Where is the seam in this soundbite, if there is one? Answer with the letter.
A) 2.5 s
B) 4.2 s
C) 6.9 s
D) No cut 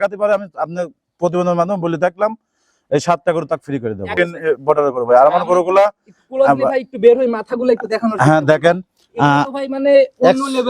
B